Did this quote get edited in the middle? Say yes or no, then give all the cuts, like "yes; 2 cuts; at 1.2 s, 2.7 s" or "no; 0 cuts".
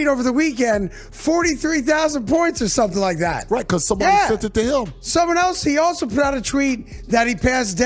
no; 0 cuts